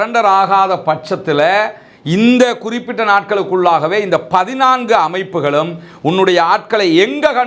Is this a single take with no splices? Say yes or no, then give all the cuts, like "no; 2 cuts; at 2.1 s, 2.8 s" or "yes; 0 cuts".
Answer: yes; 0 cuts